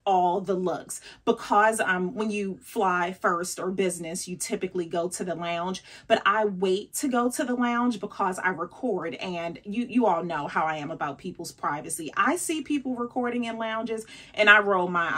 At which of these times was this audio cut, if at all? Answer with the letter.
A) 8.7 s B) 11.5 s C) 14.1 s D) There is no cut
D